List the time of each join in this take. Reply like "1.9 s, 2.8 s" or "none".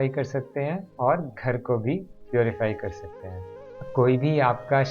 3.8 s